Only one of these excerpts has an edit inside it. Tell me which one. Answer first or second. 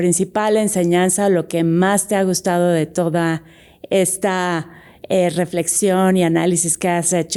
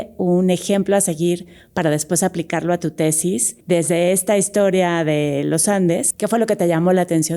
second